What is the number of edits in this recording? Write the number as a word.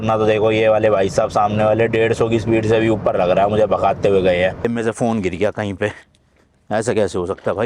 one